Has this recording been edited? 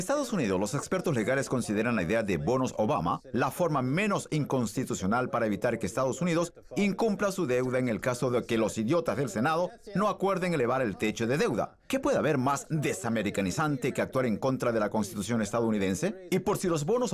no; 0 cuts

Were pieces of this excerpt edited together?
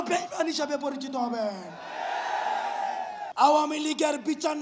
yes; 1 cut; at 3.2 s

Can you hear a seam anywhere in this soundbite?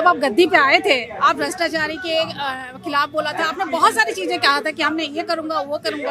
no; 0 cuts

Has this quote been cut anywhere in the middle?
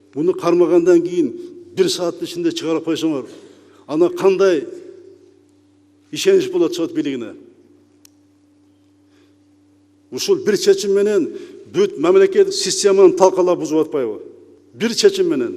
no; 0 cuts

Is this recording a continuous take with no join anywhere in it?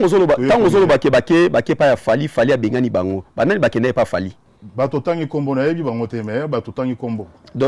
yes; 0 cuts

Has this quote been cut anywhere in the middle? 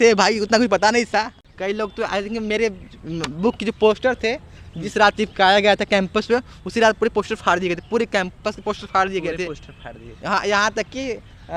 yes; 1 cut; at 1.4 s

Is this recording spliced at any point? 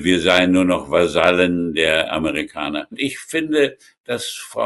yes; 1 cut; at 3.0 s

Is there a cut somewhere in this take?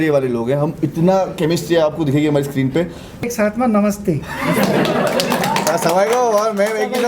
yes; 1 cut; at 3.2 s

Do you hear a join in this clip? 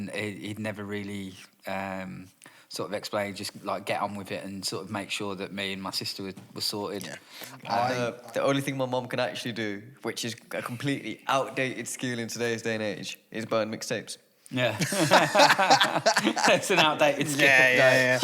yes; 1 cut; at 8.0 s

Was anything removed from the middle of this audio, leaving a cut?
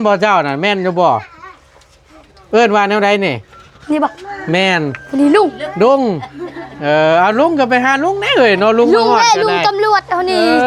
no; 0 cuts

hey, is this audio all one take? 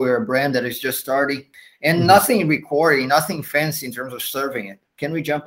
no; 1 cut; at 1.5 s

